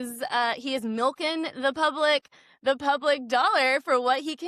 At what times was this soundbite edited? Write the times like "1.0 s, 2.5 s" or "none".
none